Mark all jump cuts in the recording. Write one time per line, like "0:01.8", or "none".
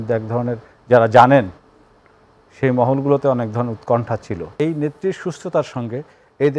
0:04.5